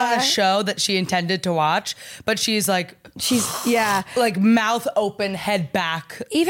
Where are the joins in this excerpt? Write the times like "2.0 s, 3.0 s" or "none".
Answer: none